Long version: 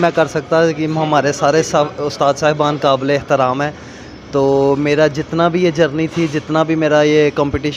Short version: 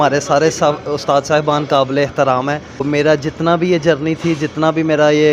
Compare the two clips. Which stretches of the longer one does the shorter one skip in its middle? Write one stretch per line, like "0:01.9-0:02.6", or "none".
0:04.0-0:04.8